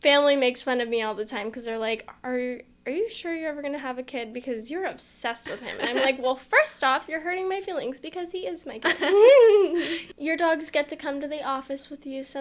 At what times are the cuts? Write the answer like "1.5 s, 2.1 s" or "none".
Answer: 10.0 s